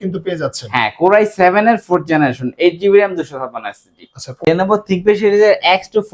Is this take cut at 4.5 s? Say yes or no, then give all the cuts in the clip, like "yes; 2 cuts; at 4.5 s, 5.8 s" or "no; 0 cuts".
yes; 1 cut; at 4.5 s